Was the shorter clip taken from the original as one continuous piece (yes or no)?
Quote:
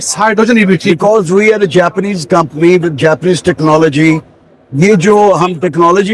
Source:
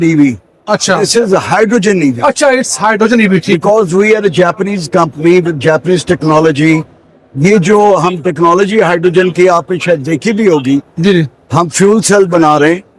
yes